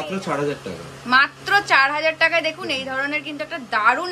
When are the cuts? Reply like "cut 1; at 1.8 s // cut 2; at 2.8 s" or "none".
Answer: none